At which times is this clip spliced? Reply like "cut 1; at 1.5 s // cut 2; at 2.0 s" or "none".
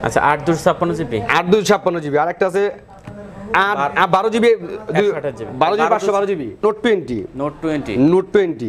cut 1; at 6.6 s